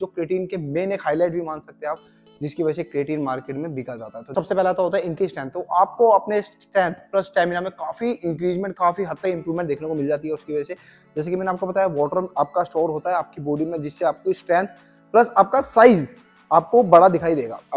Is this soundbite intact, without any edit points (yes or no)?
yes